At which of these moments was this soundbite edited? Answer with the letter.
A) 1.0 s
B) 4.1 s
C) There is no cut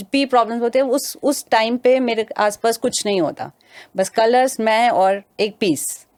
C